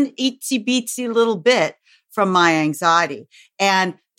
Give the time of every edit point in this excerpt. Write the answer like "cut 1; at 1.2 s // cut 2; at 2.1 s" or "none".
none